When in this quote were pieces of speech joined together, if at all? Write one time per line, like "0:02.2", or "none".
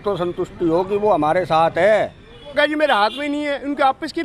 0:02.5